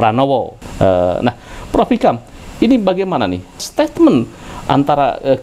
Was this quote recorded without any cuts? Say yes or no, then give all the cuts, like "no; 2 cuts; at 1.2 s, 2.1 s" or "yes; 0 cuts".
no; 1 cut; at 3.6 s